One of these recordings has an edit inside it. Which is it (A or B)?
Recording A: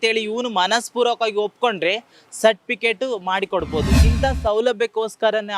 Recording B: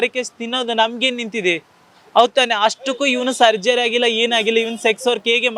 A